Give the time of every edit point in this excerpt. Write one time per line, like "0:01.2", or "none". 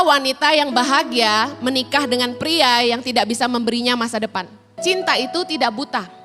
0:04.8

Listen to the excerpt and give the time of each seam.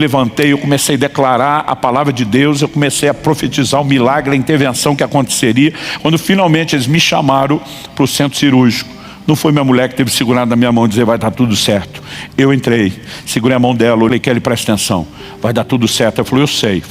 0:14.1

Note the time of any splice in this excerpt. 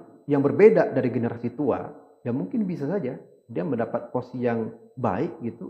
none

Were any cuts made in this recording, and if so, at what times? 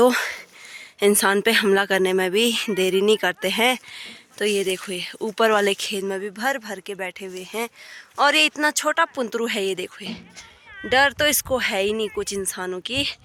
none

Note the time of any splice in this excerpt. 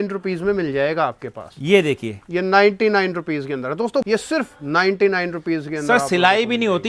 0:04.1

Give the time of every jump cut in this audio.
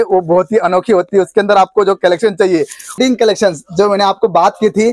0:03.0

